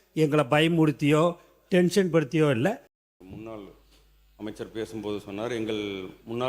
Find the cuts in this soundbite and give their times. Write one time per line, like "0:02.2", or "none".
0:02.9